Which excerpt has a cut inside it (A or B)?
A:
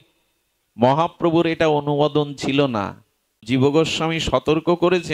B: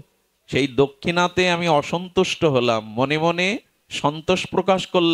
A